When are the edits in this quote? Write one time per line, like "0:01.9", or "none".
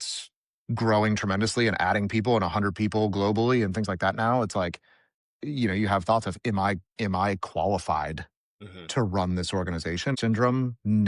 0:10.2